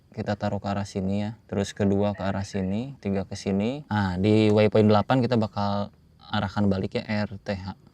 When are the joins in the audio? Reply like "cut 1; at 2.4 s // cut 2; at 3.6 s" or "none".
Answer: cut 1; at 1.4 s // cut 2; at 2.9 s // cut 3; at 3.8 s // cut 4; at 7.0 s